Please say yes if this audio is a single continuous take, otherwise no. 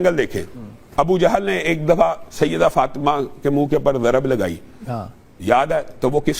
yes